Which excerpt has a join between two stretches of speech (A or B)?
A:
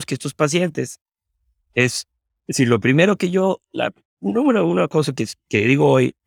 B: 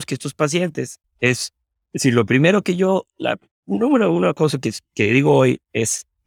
B